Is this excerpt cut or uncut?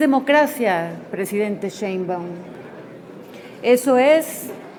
uncut